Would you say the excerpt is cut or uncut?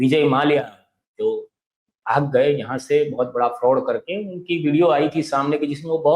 uncut